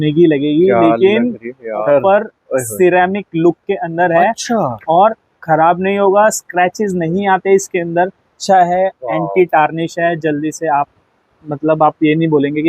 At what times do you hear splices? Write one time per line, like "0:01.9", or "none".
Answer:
0:01.8
0:08.4